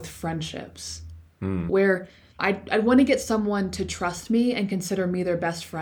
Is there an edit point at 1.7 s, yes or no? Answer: yes